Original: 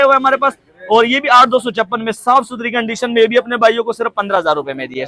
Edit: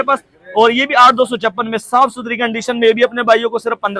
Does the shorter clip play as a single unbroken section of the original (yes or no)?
yes